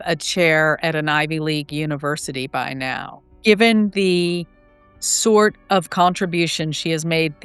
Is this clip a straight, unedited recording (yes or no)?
yes